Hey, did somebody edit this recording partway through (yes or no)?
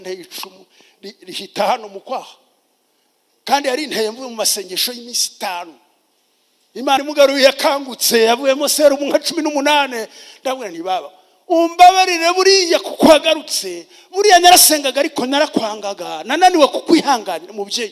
yes